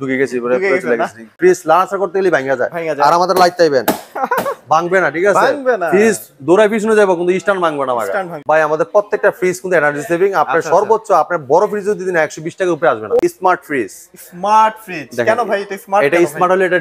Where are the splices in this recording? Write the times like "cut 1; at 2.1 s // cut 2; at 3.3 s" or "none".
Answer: cut 1; at 1.3 s // cut 2; at 8.3 s // cut 3; at 13.2 s